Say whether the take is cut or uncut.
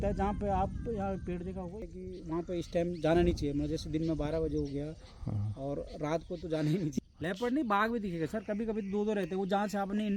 cut